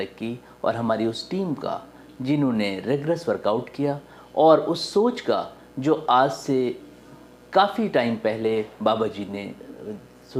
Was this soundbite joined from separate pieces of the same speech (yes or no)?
no